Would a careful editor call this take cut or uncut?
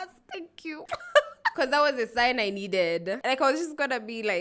cut